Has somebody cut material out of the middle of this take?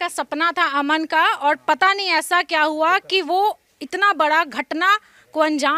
no; 0 cuts

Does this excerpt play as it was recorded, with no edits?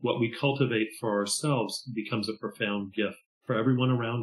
no; 1 cut; at 3.3 s

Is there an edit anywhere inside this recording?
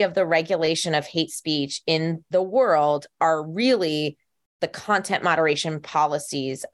no; 0 cuts

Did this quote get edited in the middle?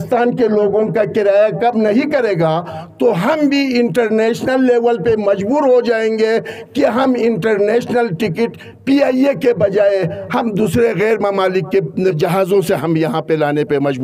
yes; 1 cut; at 12.2 s

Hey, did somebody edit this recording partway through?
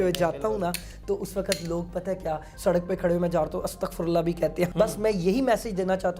yes; 2 cuts; at 2.5 s, 4.7 s

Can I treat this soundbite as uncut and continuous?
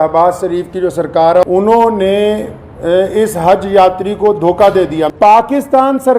no; 2 cuts; at 1.4 s, 5.1 s

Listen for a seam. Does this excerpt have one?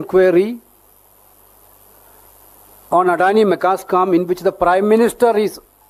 no; 0 cuts

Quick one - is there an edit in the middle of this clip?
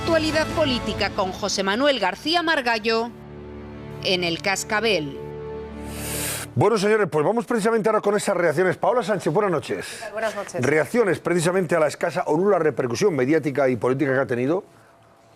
yes; 1 cut; at 5.1 s

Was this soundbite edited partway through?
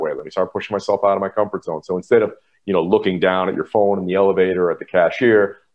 no; 0 cuts

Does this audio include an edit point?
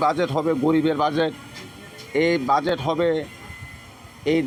no; 0 cuts

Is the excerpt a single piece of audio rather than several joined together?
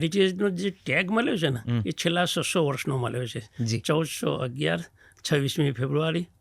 yes; 0 cuts

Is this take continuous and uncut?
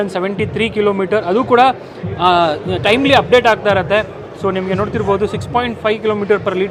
yes; 0 cuts

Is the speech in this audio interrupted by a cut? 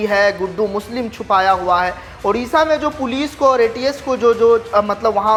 no; 0 cuts

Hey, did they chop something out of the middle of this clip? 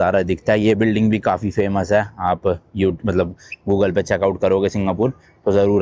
no; 0 cuts

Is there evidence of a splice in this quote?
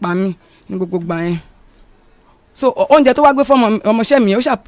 no; 0 cuts

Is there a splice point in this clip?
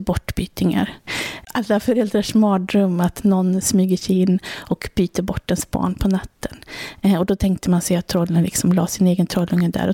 yes; 1 cut; at 1.1 s

